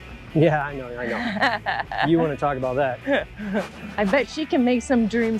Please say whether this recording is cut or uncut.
uncut